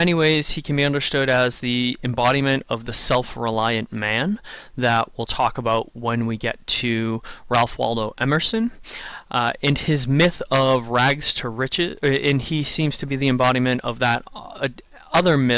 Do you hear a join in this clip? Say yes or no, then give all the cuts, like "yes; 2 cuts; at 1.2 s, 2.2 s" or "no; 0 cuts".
no; 0 cuts